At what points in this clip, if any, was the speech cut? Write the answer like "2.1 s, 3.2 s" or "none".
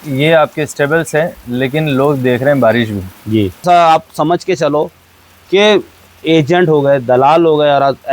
3.6 s